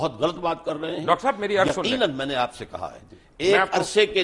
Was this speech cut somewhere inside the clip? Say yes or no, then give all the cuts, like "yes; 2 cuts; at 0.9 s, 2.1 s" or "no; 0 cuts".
no; 0 cuts